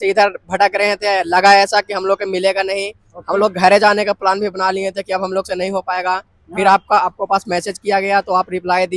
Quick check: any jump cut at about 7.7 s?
no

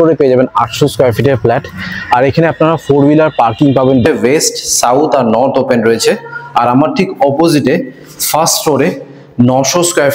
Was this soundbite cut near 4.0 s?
yes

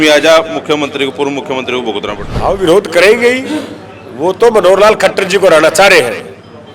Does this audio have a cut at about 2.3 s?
yes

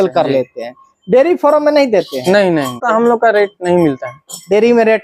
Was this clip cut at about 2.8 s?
yes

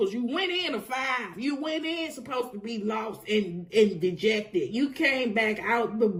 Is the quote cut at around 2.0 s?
no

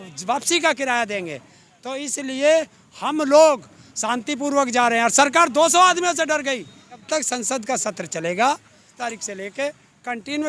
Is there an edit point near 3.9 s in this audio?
no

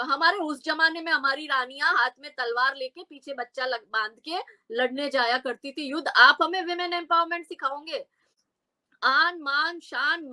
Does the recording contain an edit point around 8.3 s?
yes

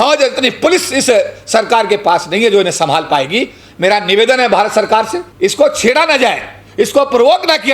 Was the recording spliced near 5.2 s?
yes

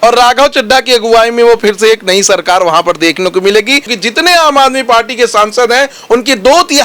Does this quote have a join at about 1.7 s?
no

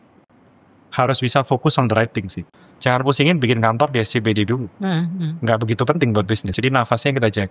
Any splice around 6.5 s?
yes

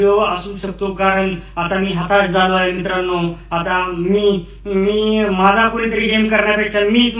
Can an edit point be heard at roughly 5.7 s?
no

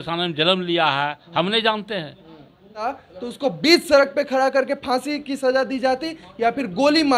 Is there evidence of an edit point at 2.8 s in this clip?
yes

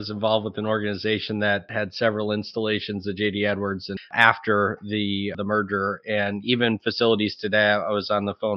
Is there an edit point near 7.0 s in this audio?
no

